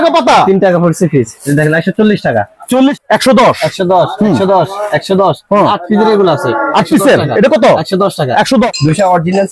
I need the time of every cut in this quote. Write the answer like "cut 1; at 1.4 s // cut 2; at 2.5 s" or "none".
cut 1; at 1.4 s // cut 2; at 3.0 s // cut 3; at 8.7 s

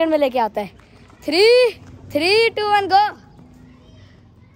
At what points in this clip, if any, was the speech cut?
none

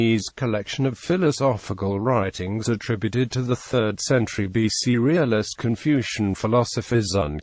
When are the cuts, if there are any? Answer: none

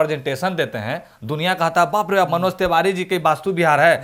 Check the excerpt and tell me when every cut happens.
none

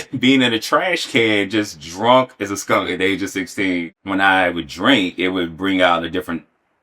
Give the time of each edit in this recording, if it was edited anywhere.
cut 1; at 3.9 s

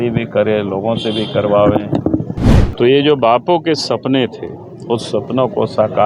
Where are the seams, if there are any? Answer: cut 1; at 2.4 s

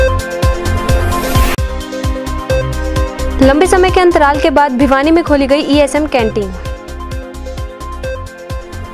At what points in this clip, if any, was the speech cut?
none

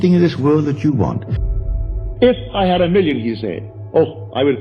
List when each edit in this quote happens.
cut 1; at 1.5 s

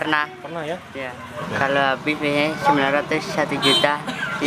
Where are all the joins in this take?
cut 1; at 1.4 s

